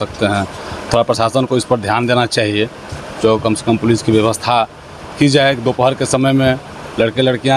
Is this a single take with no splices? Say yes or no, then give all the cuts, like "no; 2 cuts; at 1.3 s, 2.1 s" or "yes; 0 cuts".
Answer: yes; 0 cuts